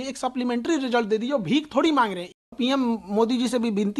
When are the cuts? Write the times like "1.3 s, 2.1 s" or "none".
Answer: 2.4 s